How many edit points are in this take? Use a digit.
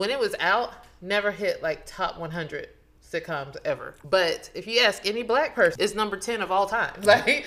2